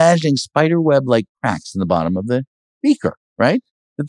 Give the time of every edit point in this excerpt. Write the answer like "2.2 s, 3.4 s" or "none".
none

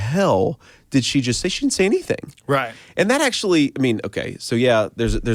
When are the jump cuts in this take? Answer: none

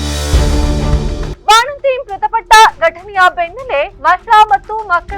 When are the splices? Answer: 1.3 s

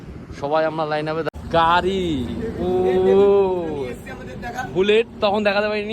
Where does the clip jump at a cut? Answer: 1.2 s

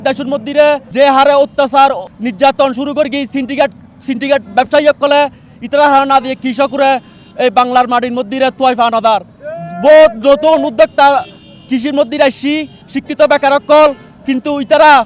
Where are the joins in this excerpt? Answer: none

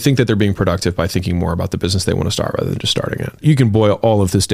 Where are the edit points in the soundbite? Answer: 3.4 s

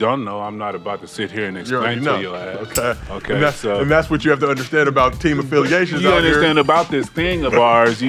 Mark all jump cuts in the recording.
none

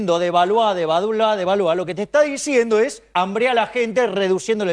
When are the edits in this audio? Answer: 3.0 s

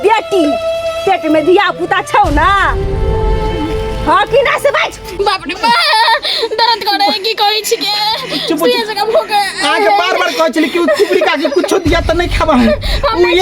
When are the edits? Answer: 5.2 s

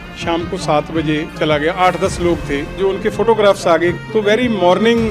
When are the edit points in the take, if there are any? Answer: 1.3 s, 2.7 s, 4.0 s

